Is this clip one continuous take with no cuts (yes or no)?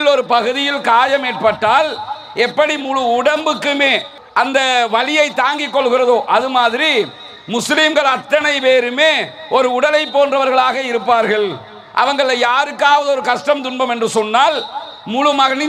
yes